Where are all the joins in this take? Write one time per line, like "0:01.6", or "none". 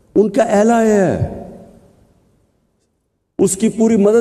none